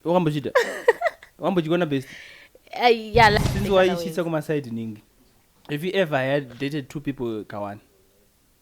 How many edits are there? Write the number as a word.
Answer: one